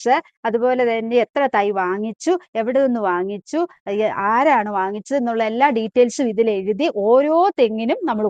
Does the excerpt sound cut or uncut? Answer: uncut